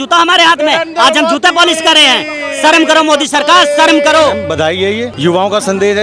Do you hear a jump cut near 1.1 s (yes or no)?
no